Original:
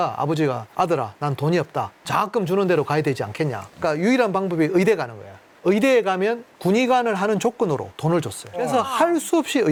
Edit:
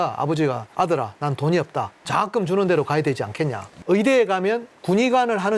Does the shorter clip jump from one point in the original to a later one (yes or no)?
yes